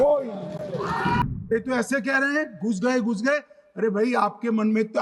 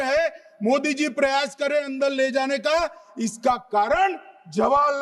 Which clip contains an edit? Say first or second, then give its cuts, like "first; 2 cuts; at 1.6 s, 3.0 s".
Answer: first; 1 cut; at 1.4 s